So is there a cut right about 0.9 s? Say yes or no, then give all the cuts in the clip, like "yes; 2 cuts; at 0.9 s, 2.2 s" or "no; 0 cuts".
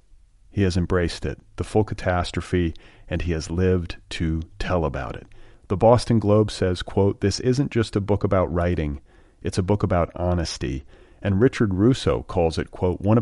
no; 0 cuts